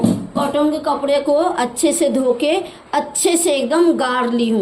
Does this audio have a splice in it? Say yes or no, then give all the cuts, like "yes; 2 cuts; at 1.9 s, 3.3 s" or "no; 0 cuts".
no; 0 cuts